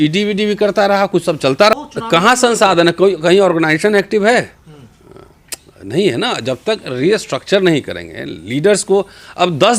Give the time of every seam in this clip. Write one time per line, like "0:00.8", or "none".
0:01.7